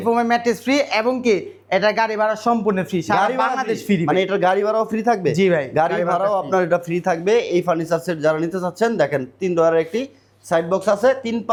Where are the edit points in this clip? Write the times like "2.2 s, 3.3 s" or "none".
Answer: none